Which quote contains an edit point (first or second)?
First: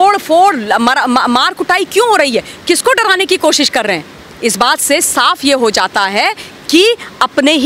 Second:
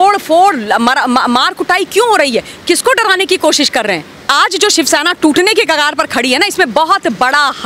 second